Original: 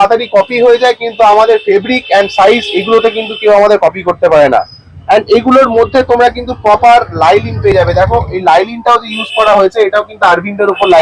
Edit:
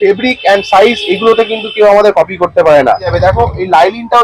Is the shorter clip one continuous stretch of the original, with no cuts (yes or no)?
no